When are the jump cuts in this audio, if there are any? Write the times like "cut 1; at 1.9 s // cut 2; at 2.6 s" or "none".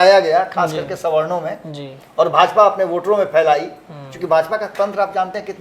none